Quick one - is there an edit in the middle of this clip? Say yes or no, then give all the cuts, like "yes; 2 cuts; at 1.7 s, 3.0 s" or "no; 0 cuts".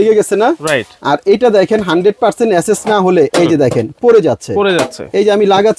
no; 0 cuts